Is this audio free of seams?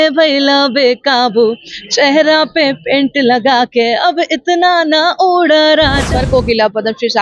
no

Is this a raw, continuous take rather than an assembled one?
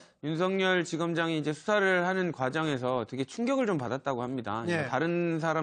no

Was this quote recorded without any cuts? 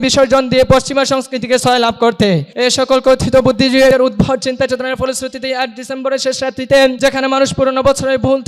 no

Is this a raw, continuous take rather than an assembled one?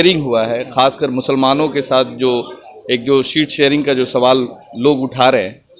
yes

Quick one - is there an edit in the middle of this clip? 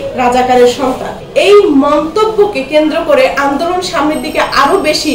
yes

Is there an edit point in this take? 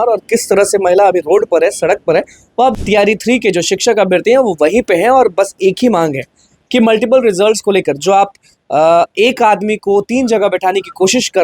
yes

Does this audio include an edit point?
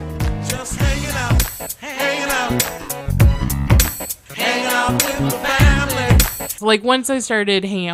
yes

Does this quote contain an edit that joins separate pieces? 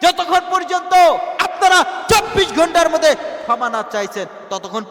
no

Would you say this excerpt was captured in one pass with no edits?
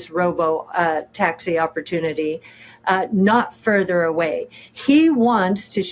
yes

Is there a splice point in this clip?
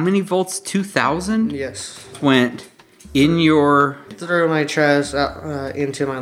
yes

